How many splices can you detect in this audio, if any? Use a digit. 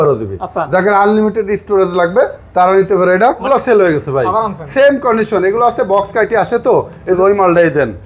2